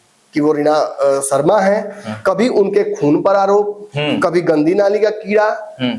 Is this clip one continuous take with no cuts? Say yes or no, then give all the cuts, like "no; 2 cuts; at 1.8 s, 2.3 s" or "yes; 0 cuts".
yes; 0 cuts